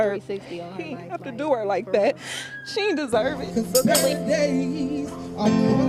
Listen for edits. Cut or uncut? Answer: uncut